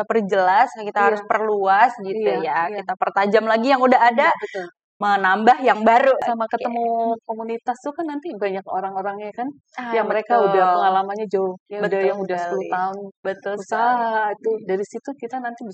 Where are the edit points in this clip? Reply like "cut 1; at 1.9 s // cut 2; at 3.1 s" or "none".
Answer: cut 1; at 6.2 s